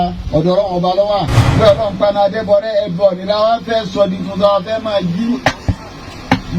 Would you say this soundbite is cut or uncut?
cut